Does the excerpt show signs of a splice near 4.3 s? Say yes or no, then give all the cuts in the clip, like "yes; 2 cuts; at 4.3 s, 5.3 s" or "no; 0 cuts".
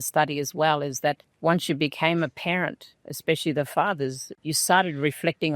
yes; 1 cut; at 4.3 s